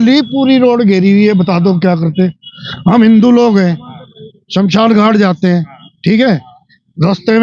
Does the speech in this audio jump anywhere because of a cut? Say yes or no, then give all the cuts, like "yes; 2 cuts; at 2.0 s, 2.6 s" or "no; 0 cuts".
no; 0 cuts